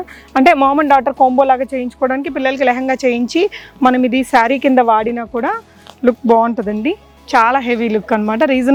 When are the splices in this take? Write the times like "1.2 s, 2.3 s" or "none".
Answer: none